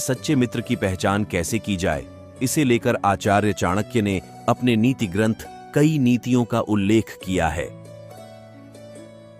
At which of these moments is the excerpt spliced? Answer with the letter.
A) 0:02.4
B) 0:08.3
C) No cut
B